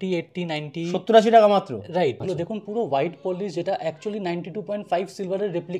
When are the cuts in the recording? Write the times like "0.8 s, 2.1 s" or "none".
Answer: 2.2 s